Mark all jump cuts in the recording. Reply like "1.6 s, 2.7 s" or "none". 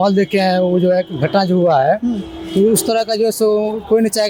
none